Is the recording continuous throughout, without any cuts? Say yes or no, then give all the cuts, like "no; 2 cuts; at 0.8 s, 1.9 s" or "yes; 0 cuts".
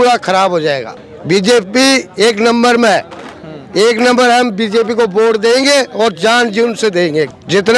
yes; 0 cuts